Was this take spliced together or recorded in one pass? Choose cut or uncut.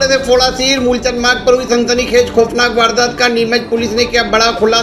uncut